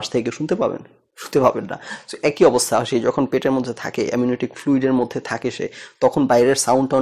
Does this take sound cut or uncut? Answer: uncut